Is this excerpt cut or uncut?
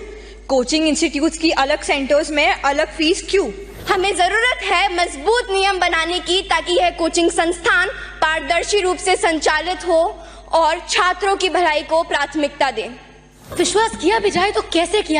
cut